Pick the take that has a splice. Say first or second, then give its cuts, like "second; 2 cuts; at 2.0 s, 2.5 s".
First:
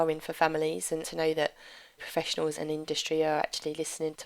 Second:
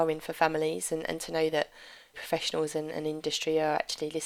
first; 2 cuts; at 1.1 s, 2.5 s